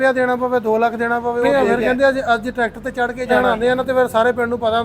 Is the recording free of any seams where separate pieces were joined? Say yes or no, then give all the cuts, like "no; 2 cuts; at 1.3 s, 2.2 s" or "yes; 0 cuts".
no; 2 cuts; at 1.5 s, 3.3 s